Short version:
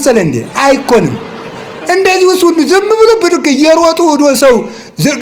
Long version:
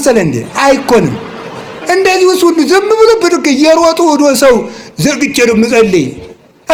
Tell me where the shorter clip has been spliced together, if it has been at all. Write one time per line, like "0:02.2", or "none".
none